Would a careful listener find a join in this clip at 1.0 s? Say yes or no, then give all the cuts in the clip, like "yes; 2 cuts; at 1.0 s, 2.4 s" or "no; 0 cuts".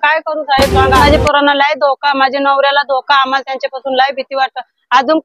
yes; 1 cut; at 1.0 s